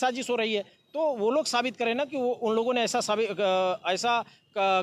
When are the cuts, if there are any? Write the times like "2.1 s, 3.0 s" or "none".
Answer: none